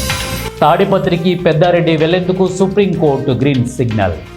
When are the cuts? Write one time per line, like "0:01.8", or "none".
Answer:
none